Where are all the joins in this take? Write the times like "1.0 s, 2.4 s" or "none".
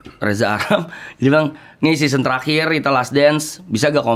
none